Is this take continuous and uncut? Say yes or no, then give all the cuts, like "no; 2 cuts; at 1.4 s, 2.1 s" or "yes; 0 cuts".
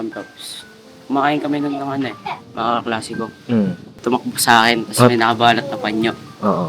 no; 1 cut; at 3.9 s